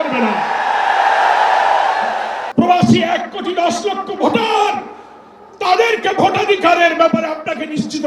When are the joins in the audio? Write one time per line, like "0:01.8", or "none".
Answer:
0:02.4